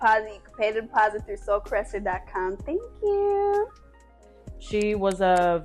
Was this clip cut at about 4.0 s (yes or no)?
yes